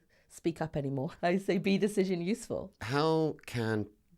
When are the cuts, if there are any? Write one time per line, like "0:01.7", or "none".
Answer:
0:01.1
0:02.8